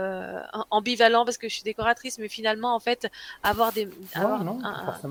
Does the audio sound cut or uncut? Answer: uncut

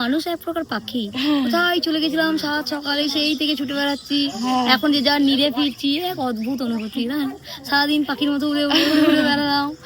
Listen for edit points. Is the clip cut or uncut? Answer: uncut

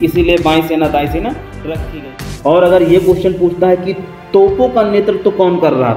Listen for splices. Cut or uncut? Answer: cut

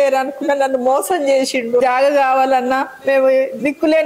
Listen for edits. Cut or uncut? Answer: cut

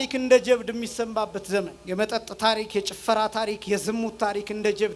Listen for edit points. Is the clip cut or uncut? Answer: cut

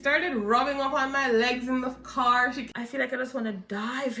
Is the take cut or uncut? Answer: cut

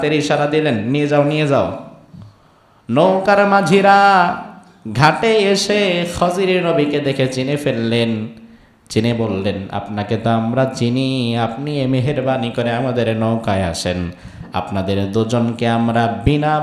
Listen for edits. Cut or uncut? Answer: uncut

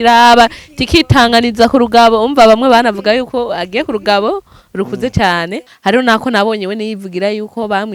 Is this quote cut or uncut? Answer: cut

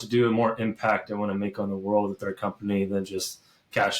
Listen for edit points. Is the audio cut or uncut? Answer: uncut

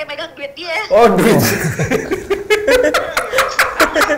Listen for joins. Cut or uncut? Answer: uncut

